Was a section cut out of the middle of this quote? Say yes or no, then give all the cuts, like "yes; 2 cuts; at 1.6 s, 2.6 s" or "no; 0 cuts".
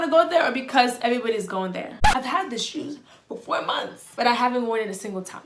yes; 1 cut; at 2.0 s